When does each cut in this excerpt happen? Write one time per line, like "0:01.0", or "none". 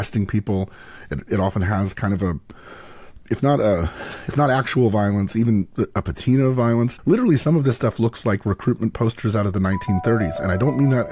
0:07.0